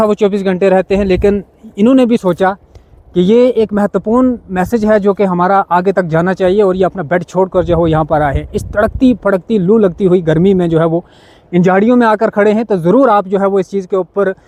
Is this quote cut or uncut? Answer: uncut